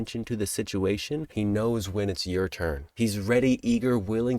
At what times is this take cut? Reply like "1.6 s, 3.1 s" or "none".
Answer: 1.3 s, 2.9 s

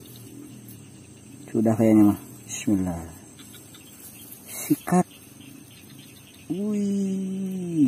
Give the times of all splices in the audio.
none

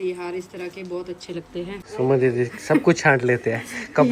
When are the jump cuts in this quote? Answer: 1.8 s

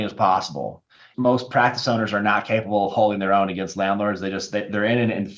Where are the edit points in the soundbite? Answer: 1.1 s

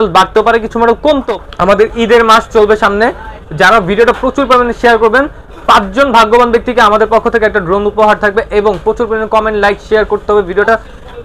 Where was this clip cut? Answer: 1.3 s

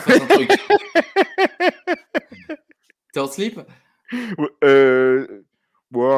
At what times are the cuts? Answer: none

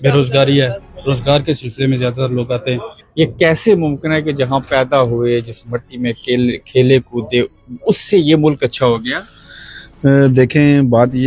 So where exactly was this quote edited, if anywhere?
3.0 s

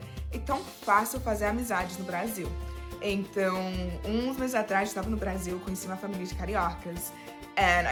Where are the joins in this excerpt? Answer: none

